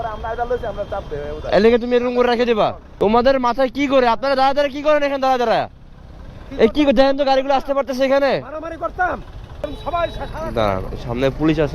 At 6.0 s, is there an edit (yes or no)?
no